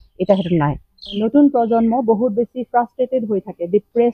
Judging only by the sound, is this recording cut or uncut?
cut